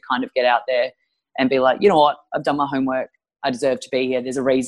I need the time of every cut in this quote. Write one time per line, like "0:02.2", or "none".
none